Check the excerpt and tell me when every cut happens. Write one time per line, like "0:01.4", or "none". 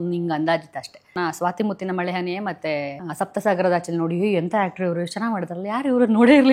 0:01.1
0:03.0